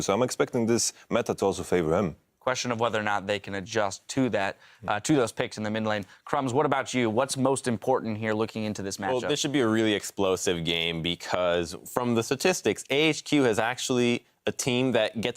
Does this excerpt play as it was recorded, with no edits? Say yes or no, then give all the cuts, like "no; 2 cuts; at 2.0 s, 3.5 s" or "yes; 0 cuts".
no; 1 cut; at 10.5 s